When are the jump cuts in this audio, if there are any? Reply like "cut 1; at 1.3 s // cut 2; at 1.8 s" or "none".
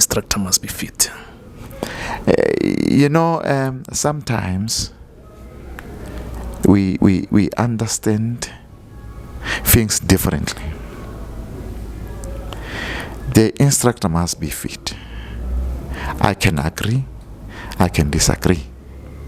none